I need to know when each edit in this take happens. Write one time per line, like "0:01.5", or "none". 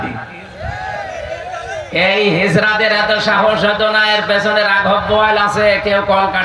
none